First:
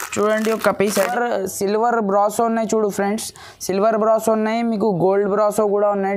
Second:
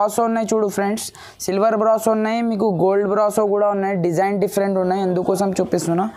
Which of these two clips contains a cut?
first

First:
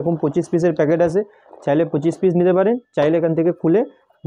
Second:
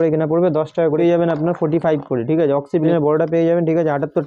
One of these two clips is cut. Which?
second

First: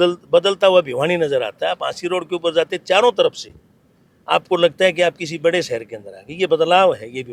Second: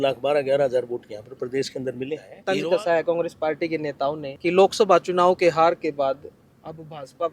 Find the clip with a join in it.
second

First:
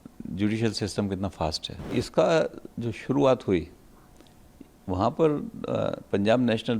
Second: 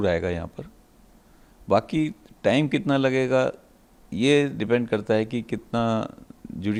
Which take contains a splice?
first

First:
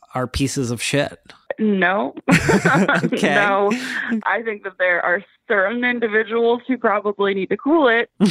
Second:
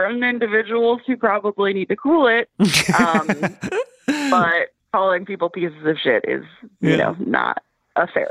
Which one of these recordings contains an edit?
first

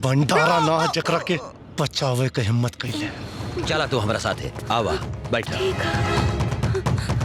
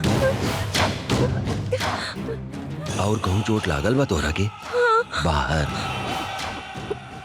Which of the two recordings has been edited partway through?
first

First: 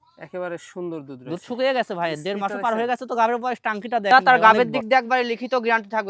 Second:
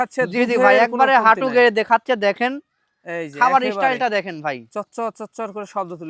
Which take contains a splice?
first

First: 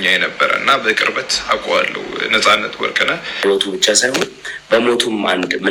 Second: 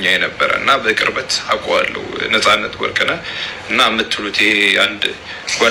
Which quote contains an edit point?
first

